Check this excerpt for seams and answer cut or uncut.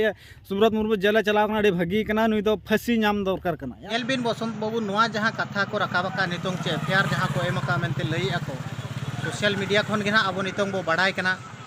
cut